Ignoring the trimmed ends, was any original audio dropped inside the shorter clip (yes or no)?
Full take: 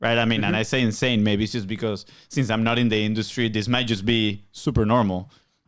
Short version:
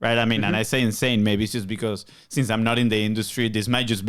no